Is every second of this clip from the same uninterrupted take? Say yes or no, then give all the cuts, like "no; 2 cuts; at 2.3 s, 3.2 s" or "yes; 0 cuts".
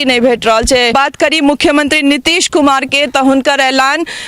no; 1 cut; at 0.9 s